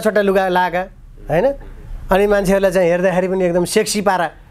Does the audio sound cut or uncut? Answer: uncut